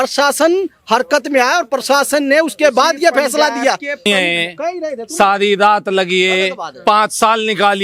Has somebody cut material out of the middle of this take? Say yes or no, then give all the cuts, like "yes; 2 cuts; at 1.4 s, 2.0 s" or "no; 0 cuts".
yes; 1 cut; at 4.1 s